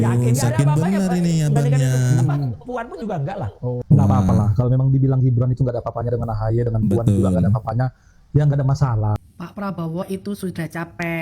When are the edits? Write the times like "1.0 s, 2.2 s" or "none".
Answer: 9.2 s